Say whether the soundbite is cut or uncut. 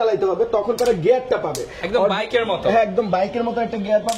uncut